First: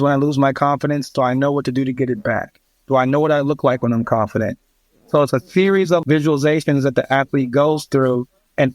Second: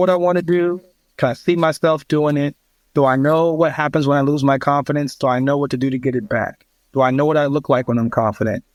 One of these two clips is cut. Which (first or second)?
first